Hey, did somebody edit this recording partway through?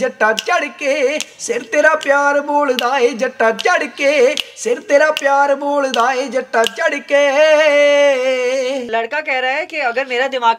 yes; 1 cut; at 8.9 s

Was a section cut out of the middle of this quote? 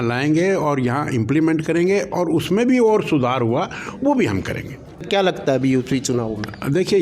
yes; 1 cut; at 5.1 s

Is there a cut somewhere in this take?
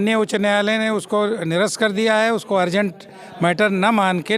no; 0 cuts

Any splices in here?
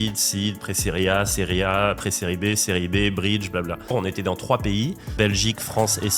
yes; 2 cuts; at 3.9 s, 5.2 s

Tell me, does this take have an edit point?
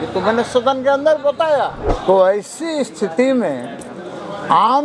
yes; 1 cut; at 1.9 s

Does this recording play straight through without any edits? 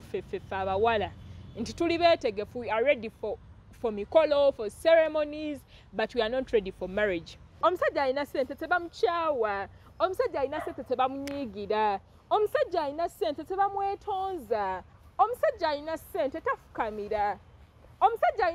no; 1 cut; at 7.4 s

